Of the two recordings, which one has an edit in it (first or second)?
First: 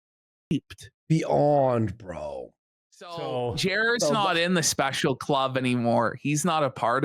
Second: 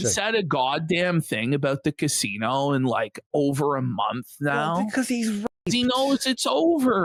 first